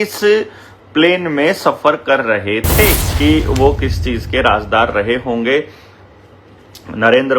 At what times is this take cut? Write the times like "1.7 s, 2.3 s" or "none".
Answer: 3.0 s